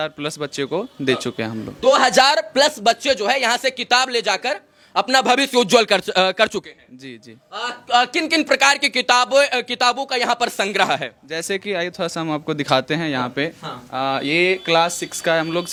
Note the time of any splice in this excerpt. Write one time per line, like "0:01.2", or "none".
none